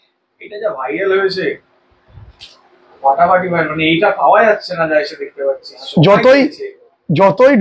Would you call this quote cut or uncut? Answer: uncut